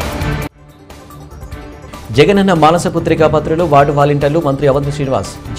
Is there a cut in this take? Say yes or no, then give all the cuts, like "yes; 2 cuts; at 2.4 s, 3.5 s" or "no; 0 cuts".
yes; 1 cut; at 1.5 s